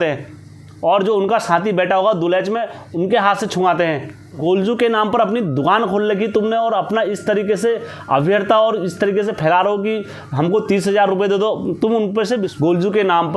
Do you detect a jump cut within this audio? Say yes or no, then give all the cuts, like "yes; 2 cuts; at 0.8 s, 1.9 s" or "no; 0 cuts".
yes; 2 cuts; at 4.4 s, 12.3 s